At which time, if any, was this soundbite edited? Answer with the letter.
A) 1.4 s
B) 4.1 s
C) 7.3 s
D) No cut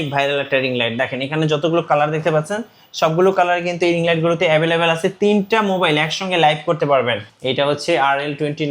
C